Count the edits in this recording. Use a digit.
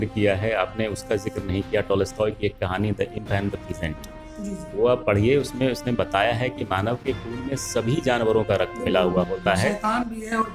0